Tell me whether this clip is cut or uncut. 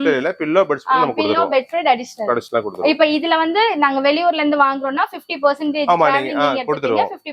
uncut